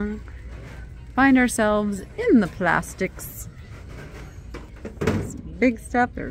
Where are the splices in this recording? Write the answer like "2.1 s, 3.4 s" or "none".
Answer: 4.7 s